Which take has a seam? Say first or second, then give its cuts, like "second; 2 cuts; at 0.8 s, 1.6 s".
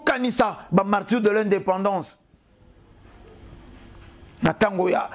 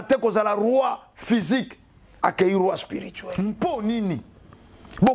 second; 1 cut; at 3.2 s